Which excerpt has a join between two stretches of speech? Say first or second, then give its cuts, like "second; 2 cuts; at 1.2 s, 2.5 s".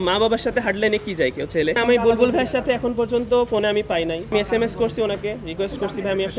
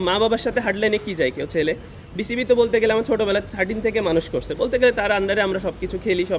first; 2 cuts; at 1.8 s, 4.3 s